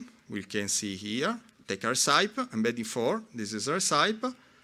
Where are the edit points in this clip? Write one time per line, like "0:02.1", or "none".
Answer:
0:01.5

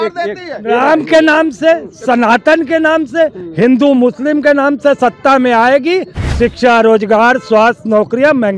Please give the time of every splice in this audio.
none

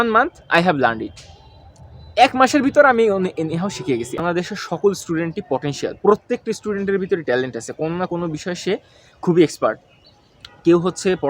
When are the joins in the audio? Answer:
0:04.2

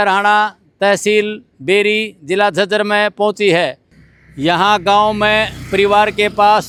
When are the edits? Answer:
none

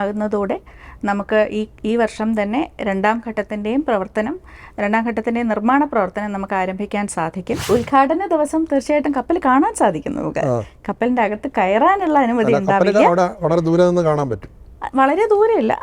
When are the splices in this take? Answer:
0:07.6

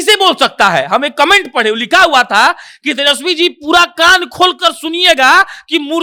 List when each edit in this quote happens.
none

